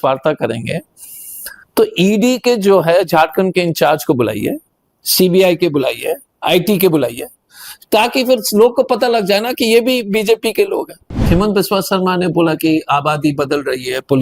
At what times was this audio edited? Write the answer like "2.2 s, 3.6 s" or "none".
11.2 s